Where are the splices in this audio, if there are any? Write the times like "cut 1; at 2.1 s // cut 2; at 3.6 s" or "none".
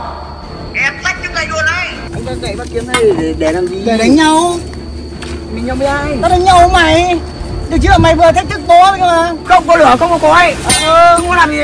cut 1; at 2.1 s // cut 2; at 9.4 s

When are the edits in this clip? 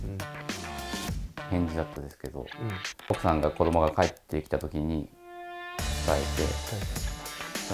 cut 1; at 3.1 s

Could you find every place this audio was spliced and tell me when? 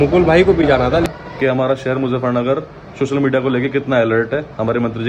cut 1; at 1.1 s

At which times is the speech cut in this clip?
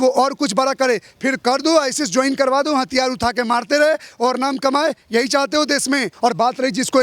cut 1; at 6.1 s

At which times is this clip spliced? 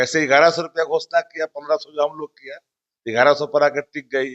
none

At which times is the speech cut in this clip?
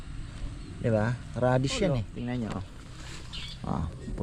cut 1; at 2.1 s

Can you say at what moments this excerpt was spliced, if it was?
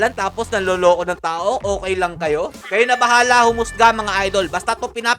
cut 1; at 2.6 s

